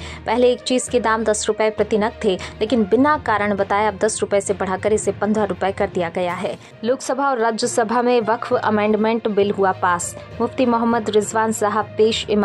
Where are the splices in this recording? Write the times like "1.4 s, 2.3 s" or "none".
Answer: 6.8 s